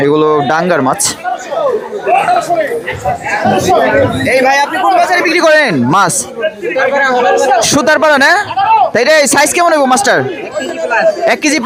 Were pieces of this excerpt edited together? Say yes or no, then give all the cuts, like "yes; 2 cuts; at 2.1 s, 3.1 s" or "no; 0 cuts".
no; 0 cuts